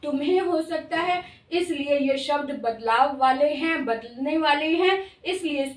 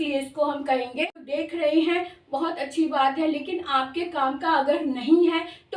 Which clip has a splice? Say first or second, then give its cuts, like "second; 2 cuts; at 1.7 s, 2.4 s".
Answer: second; 1 cut; at 1.3 s